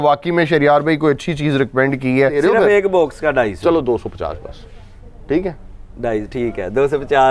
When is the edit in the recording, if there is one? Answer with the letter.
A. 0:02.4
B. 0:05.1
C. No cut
A